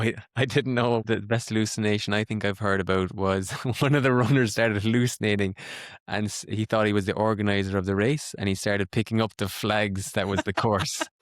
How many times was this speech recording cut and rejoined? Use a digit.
1